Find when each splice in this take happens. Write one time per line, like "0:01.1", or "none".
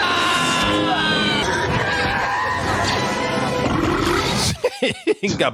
0:01.4